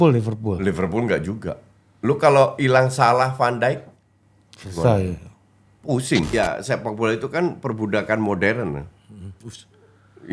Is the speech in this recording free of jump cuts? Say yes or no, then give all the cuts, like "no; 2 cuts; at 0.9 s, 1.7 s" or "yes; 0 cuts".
no; 1 cut; at 6.3 s